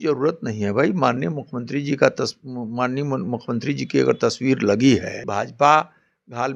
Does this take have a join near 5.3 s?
yes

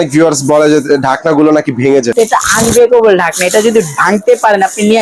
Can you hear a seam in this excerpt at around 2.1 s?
yes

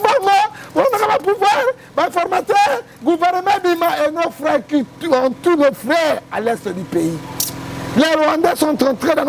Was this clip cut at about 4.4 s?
no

